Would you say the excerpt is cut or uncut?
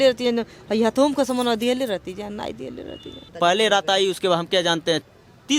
cut